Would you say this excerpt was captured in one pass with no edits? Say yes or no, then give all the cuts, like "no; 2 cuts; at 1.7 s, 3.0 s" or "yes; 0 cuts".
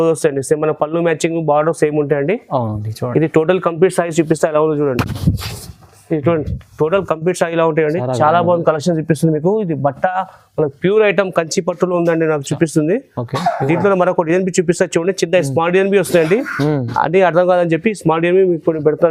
yes; 0 cuts